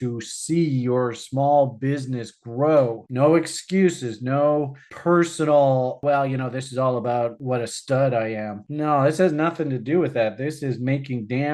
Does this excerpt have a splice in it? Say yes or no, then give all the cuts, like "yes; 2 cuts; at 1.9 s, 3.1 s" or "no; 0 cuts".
yes; 2 cuts; at 6.0 s, 7.4 s